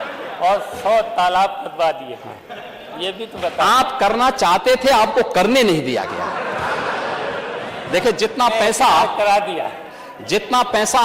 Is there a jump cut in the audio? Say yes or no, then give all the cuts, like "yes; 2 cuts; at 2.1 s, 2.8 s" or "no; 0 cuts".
no; 0 cuts